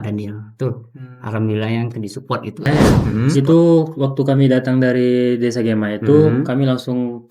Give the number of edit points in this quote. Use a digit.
1